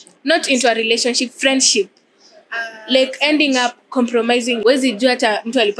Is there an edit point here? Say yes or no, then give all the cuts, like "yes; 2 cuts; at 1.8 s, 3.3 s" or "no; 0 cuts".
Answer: yes; 1 cut; at 4.6 s